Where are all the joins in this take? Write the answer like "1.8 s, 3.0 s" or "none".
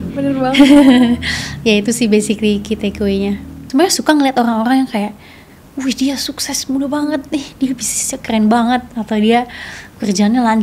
3.5 s